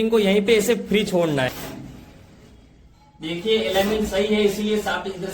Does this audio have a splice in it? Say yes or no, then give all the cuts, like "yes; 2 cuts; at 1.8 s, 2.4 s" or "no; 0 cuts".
yes; 1 cut; at 1.5 s